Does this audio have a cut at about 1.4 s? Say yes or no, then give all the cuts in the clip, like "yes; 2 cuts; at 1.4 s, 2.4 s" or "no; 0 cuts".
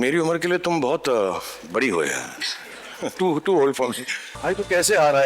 no; 2 cuts; at 3.1 s, 4.4 s